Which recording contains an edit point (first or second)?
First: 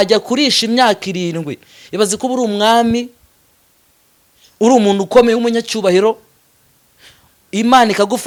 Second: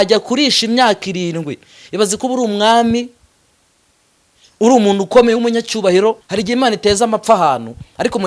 second